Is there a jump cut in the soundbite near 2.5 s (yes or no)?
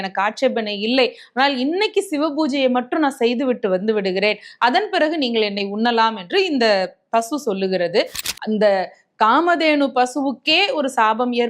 no